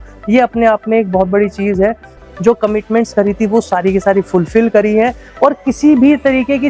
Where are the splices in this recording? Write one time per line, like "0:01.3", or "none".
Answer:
0:02.1

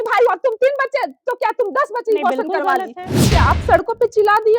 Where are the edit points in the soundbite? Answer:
0:03.3

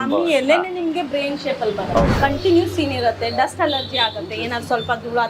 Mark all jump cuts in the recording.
0:02.1

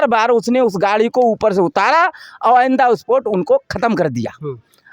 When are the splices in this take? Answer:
none

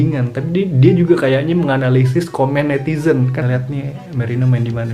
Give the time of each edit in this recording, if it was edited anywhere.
0:03.4

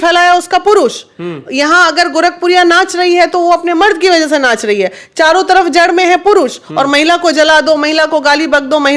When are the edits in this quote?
none

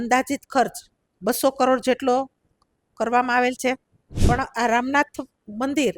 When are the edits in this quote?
0:04.2

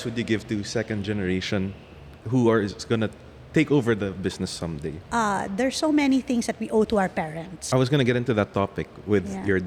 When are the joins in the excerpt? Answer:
0:02.2
0:05.0
0:07.5

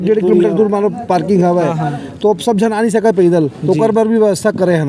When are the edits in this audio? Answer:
none

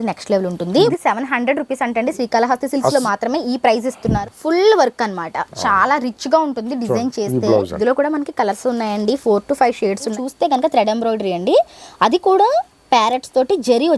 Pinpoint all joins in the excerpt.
0:00.9
0:04.2
0:07.7
0:10.1

